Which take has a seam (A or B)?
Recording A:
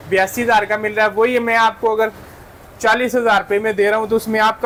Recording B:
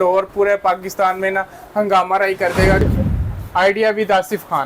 B